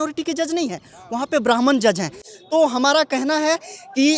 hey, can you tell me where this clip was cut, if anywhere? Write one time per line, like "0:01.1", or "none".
none